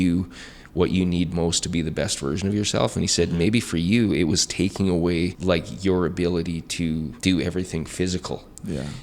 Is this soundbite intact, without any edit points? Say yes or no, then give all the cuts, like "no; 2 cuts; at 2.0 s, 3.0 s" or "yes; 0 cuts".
no; 2 cuts; at 5.4 s, 7.1 s